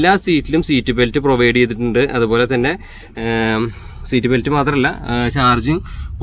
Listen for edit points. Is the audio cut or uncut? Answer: uncut